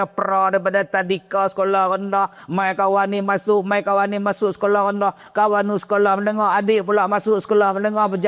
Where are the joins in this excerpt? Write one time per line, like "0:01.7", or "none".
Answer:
none